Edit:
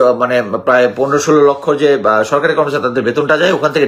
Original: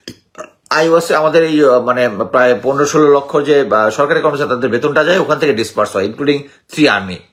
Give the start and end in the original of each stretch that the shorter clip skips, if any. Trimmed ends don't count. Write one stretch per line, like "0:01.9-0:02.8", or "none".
none